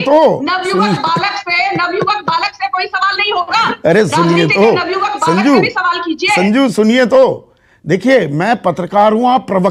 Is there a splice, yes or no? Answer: no